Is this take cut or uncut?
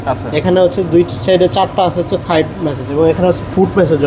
uncut